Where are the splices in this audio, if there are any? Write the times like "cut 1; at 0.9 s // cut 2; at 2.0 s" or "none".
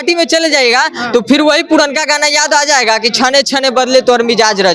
none